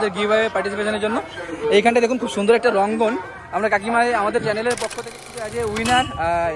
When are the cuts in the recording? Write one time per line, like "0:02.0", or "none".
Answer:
0:05.2